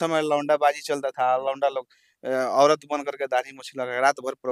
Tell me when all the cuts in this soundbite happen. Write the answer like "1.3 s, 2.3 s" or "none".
none